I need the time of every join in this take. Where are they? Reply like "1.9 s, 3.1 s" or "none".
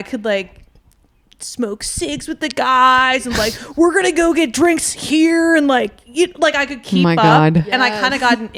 none